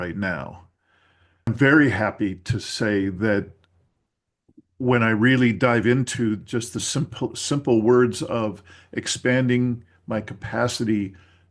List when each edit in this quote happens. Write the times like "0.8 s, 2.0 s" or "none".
1.5 s